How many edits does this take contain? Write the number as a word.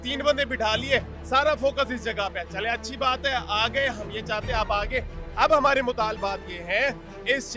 zero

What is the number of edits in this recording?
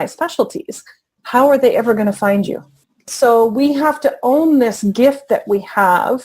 one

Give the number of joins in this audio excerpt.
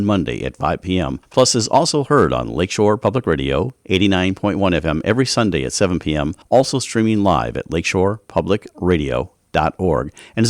two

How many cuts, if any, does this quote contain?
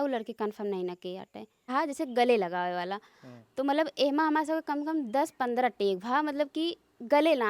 one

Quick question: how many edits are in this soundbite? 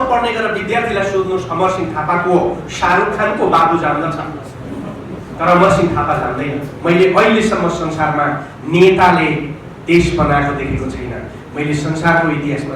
one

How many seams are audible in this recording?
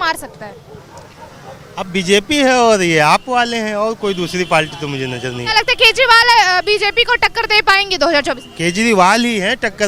zero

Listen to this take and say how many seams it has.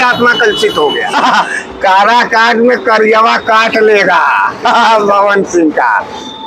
one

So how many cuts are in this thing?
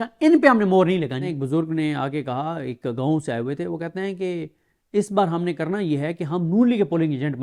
one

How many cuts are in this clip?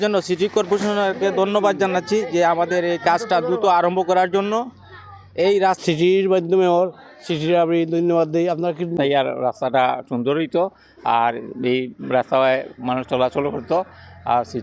two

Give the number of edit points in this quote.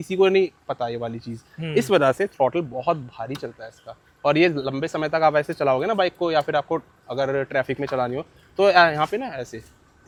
zero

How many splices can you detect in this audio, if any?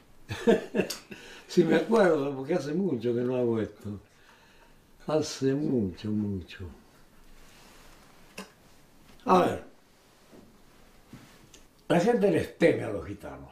one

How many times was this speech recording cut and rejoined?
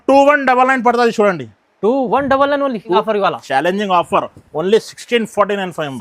one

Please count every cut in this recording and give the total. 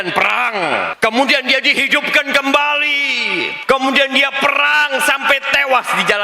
two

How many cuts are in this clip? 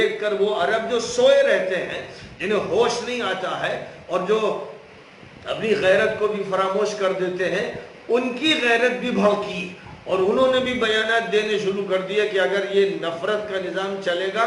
zero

